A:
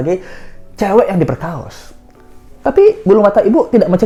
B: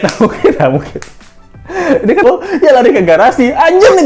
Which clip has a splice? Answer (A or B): B